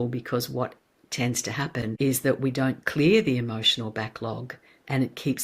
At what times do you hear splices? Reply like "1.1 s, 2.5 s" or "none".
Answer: 1.9 s